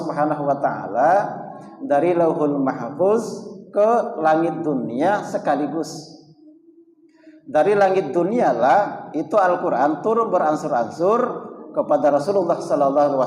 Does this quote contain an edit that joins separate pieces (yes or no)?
no